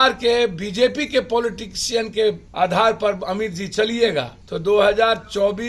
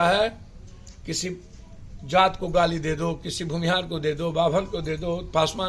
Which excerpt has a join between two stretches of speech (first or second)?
first